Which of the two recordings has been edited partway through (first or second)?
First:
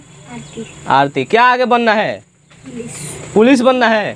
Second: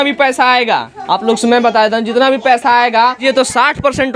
second